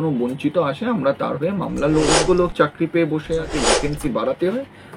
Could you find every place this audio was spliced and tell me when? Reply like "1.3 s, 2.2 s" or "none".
2.1 s, 3.5 s